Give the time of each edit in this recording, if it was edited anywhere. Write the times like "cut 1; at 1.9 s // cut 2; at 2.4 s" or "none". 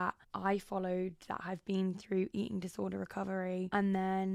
none